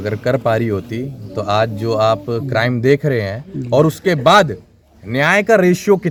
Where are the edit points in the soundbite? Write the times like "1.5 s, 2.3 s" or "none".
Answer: none

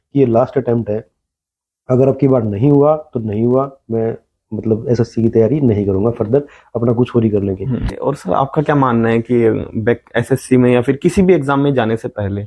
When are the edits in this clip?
none

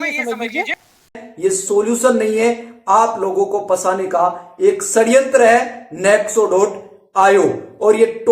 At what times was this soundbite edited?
1.1 s

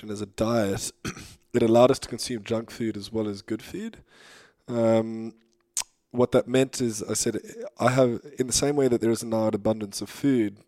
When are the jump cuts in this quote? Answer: none

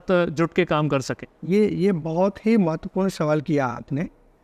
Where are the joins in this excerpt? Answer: none

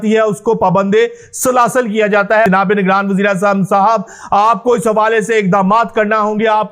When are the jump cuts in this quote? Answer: 2.5 s

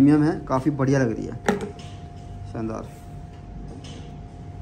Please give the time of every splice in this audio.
none

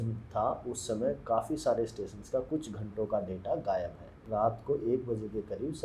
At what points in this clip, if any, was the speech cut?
4.2 s

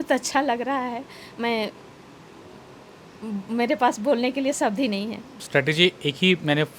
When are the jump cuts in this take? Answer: 5.4 s

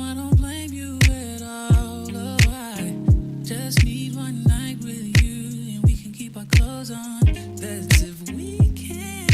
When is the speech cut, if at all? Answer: 2.5 s

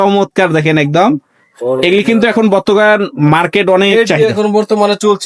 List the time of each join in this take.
none

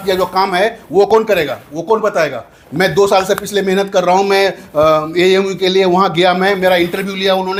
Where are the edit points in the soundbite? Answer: none

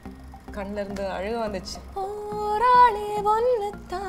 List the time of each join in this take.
1.8 s

